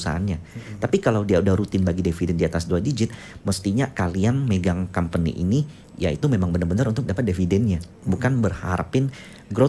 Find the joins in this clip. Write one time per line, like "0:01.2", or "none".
none